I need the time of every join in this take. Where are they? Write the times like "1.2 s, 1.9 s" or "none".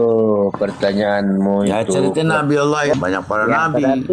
2.9 s